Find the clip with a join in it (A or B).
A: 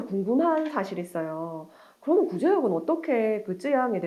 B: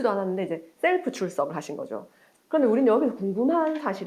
B